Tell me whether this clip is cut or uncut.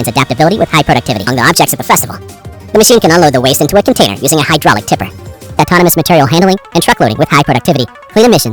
cut